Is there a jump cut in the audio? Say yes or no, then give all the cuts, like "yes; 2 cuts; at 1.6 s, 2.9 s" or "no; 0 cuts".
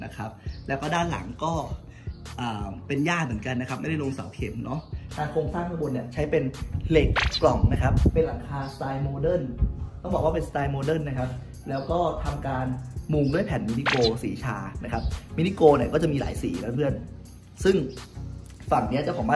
yes; 1 cut; at 5.0 s